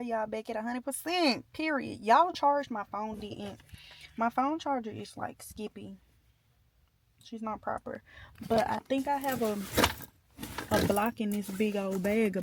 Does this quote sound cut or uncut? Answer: uncut